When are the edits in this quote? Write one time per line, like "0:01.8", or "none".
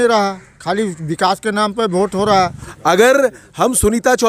0:02.6